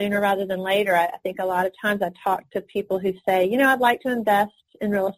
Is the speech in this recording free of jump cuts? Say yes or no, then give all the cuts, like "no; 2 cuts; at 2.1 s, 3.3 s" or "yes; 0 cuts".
yes; 0 cuts